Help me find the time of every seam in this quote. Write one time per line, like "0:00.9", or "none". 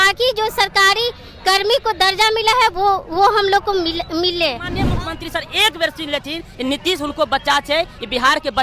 0:04.8